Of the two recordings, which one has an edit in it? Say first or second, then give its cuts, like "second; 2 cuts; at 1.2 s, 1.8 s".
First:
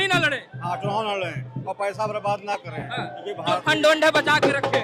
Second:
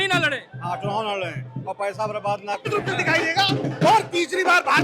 second; 1 cut; at 2.7 s